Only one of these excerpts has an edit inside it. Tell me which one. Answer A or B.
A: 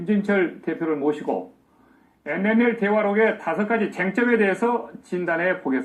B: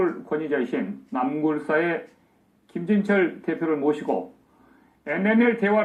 A